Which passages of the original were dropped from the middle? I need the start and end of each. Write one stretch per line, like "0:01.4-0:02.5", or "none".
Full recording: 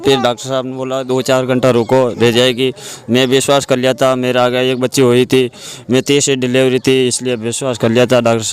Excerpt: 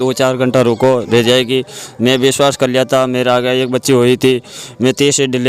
none